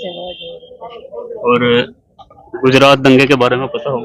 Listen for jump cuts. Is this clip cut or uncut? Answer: uncut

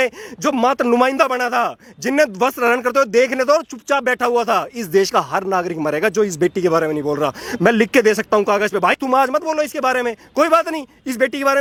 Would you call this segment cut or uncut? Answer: uncut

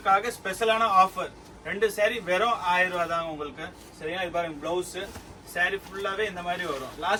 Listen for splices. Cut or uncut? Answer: uncut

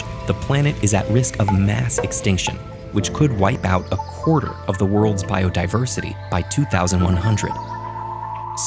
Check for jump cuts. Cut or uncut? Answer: uncut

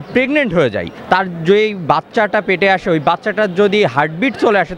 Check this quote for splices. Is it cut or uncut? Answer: cut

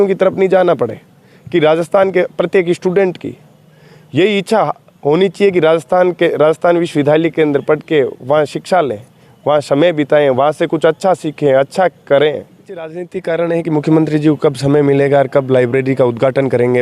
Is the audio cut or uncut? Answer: cut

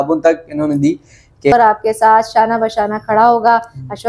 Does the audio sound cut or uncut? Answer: cut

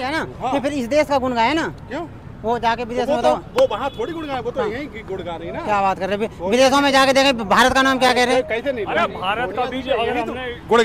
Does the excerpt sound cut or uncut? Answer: uncut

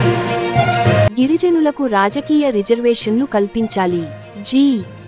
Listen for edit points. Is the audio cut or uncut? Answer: cut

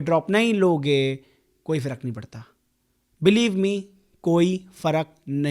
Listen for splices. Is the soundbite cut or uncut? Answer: uncut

